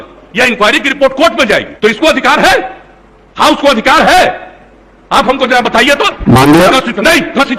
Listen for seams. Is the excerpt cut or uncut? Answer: cut